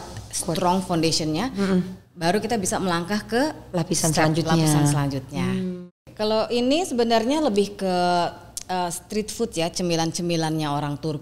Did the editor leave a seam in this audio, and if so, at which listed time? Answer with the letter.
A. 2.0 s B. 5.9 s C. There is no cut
B